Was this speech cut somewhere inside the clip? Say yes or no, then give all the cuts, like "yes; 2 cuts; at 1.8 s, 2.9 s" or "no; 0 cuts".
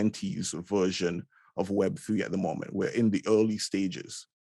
no; 0 cuts